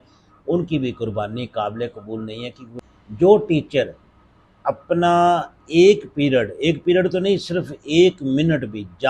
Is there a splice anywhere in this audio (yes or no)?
yes